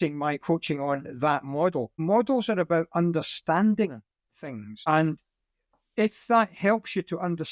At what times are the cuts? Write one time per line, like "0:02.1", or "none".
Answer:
0:01.9
0:04.8